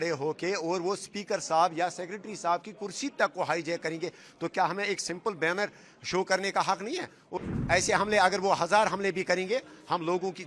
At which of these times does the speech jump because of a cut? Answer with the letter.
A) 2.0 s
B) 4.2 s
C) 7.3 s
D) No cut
C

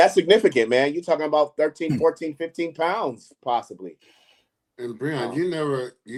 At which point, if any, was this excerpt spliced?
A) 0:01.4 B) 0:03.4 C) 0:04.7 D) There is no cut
D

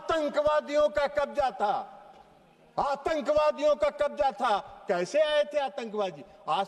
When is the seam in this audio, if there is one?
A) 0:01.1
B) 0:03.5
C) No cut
C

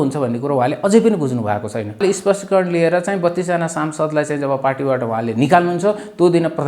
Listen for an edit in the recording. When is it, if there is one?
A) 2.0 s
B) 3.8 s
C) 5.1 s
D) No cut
A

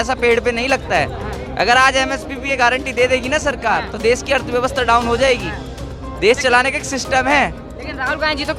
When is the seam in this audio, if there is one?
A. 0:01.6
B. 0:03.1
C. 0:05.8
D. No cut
D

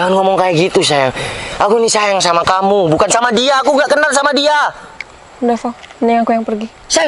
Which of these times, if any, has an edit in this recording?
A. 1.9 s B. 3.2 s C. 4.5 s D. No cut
D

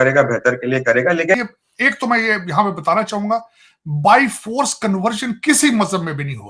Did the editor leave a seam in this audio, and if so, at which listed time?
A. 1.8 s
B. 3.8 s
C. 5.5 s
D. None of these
A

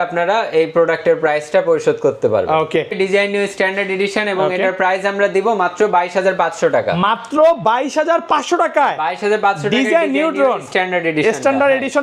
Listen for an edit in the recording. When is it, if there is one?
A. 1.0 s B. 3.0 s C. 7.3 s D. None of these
B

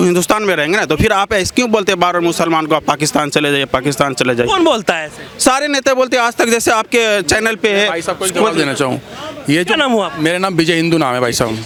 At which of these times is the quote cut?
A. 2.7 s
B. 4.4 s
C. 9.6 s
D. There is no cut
D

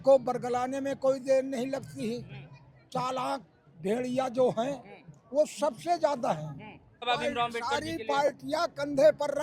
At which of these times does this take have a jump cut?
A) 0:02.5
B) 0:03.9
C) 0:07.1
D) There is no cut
C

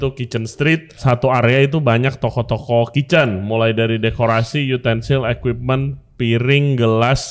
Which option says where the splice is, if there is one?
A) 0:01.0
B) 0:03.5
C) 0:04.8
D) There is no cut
A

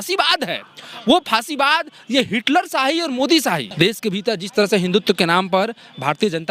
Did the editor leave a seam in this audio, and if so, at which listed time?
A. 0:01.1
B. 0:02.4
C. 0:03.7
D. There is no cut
C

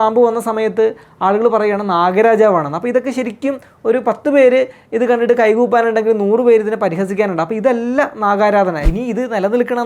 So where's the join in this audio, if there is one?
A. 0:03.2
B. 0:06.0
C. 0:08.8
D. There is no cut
C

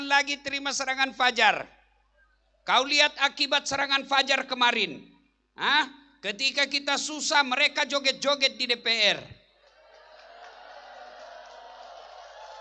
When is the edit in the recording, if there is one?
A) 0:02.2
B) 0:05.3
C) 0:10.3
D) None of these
D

